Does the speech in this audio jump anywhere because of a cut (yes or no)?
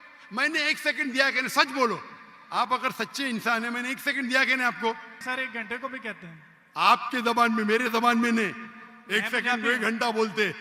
yes